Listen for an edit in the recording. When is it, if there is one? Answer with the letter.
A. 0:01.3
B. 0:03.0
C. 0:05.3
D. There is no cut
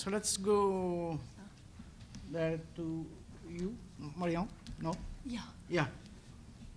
C